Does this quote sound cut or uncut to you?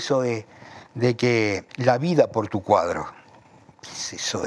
cut